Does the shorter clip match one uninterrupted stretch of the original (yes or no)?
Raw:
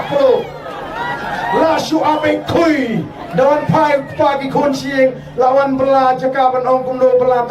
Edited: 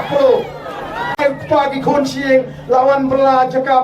no